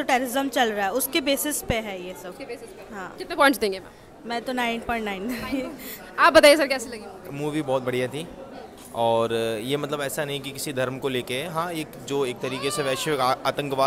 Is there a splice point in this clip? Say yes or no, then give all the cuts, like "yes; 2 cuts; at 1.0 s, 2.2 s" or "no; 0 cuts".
no; 0 cuts